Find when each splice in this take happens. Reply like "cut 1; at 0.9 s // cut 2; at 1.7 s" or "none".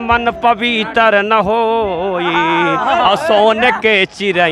none

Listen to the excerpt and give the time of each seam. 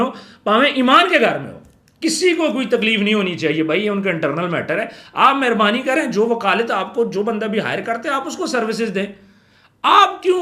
none

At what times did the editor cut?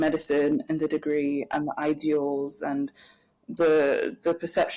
none

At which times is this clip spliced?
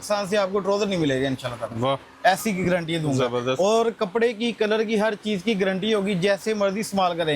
none

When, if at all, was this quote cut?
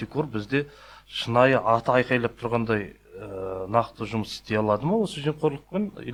none

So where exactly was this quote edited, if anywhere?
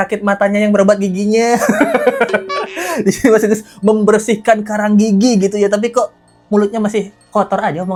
none

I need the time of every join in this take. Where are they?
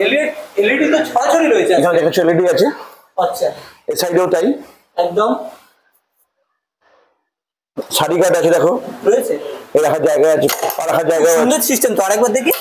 none

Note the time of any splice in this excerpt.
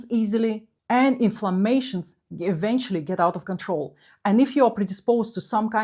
none

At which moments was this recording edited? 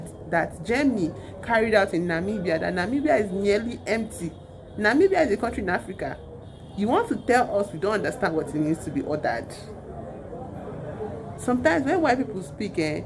cut 1; at 11.4 s

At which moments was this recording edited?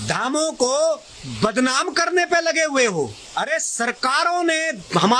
cut 1; at 3.2 s

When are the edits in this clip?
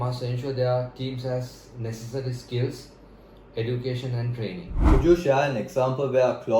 cut 1; at 4.8 s

